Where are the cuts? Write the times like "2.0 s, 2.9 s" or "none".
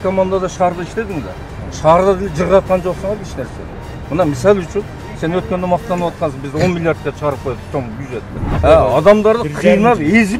8.6 s